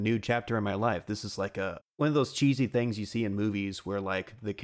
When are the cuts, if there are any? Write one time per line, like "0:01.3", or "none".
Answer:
0:01.8

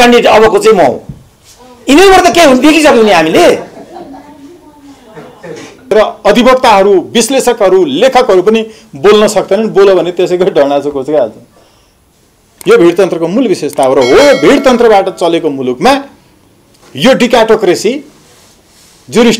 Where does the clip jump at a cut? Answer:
0:05.9

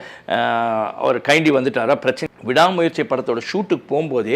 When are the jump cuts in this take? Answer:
0:02.2

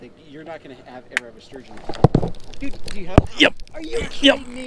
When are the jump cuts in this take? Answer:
none

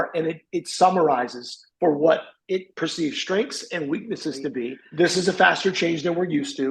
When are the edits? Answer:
0:04.8

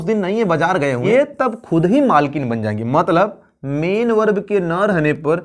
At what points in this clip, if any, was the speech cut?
0:01.0

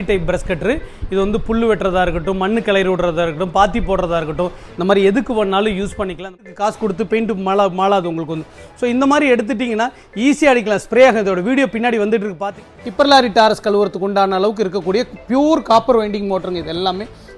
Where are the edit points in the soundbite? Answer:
0:06.4
0:12.5

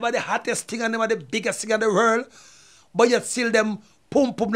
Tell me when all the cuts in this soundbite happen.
none

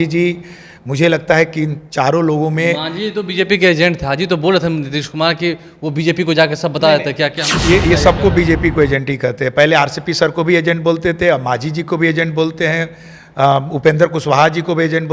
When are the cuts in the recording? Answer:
none

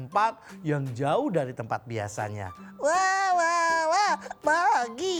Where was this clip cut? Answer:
none

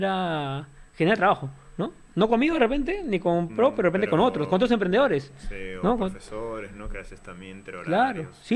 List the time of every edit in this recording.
none

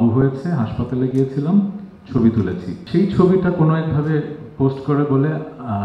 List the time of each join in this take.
0:02.8

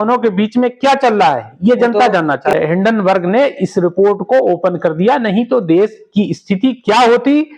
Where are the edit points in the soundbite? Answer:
0:02.5

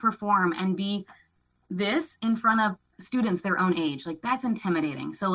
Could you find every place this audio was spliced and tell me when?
0:03.0

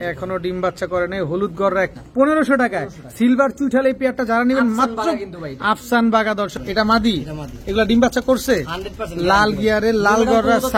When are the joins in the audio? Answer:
0:01.9
0:06.6

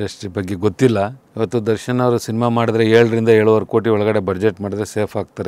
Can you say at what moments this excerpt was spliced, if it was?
0:01.2

